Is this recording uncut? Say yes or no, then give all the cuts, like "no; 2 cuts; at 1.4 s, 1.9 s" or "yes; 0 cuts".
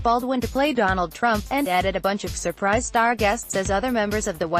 yes; 0 cuts